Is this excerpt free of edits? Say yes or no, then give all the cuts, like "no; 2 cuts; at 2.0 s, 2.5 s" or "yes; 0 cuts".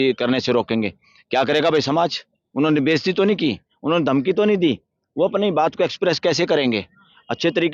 yes; 0 cuts